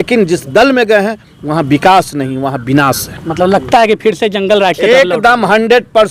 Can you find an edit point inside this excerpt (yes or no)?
no